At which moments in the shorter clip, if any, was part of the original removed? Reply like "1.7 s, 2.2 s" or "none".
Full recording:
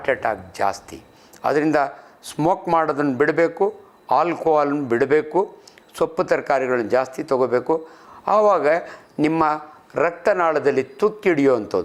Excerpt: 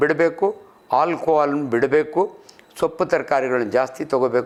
none

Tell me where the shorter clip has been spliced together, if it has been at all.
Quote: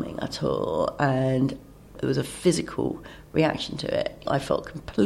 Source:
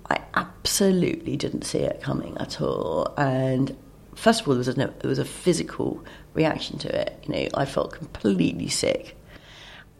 1.9 s, 4.2 s

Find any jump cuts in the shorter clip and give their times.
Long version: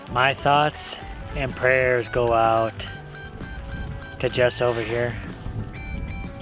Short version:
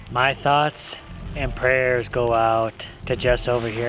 2.9 s

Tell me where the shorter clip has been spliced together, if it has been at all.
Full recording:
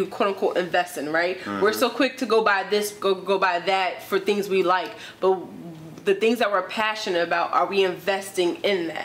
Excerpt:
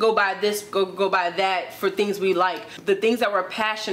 2.7 s

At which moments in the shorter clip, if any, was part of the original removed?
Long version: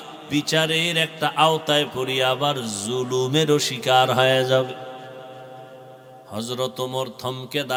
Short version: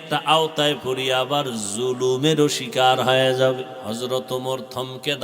3.8 s

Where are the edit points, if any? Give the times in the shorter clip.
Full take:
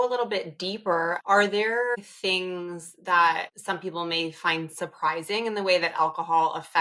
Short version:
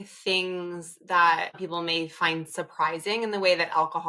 1.6 s

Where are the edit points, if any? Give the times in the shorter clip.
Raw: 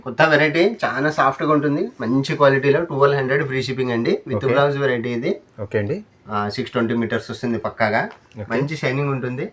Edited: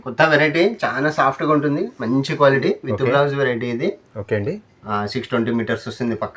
2.6 s

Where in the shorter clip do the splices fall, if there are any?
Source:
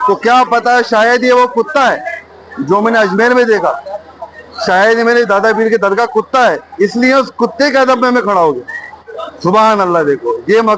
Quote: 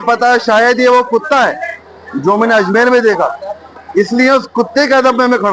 3.8 s

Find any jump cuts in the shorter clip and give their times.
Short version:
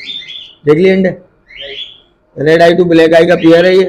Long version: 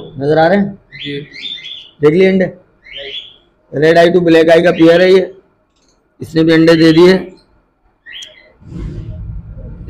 none

